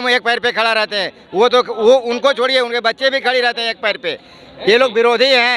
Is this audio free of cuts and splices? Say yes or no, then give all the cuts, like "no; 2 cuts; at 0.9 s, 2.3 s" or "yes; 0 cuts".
yes; 0 cuts